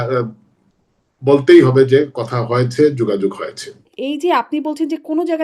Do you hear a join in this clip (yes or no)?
yes